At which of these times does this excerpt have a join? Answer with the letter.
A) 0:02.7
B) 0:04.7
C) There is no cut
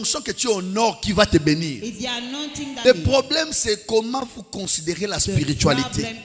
A